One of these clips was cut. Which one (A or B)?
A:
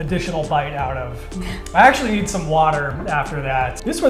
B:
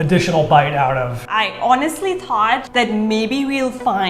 B